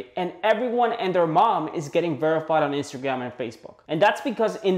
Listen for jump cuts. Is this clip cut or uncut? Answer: cut